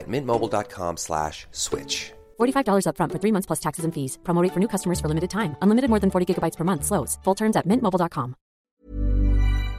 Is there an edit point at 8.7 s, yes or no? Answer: yes